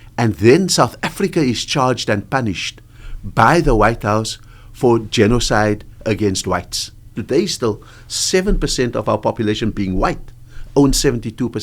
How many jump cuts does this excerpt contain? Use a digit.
1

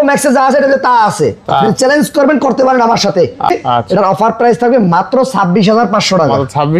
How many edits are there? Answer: 1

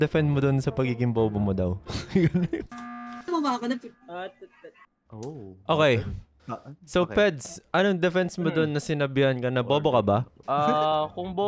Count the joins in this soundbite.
1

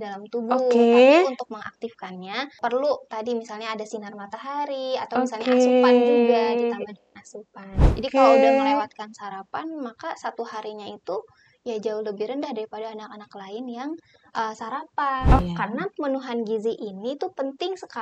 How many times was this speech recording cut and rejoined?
3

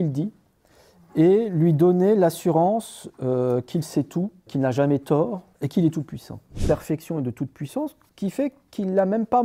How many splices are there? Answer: 1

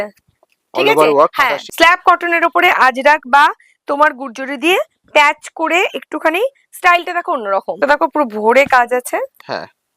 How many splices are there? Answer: 2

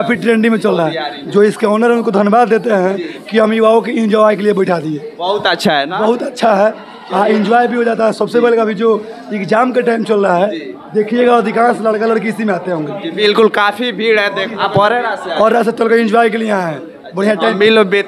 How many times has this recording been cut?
1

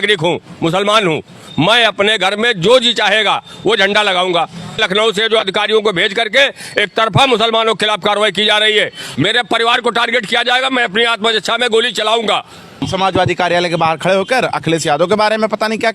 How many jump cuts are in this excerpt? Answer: 3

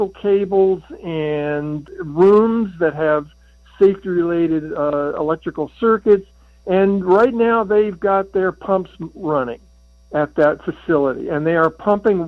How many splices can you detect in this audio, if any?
0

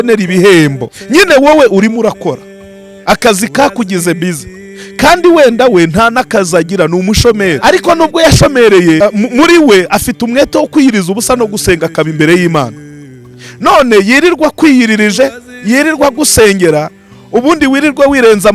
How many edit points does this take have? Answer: 3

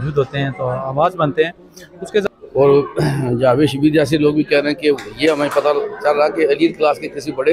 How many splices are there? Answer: 1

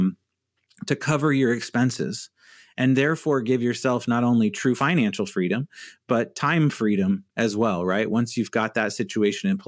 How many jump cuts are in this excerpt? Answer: 1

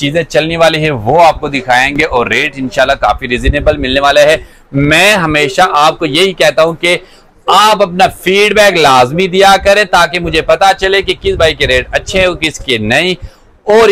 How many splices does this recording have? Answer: 0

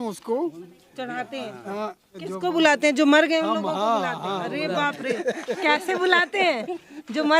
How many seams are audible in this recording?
1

